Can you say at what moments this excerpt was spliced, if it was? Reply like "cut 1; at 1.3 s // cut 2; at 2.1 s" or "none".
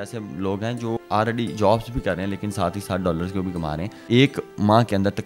cut 1; at 1.0 s // cut 2; at 4.0 s